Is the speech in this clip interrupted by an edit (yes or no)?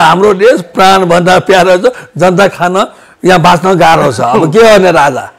no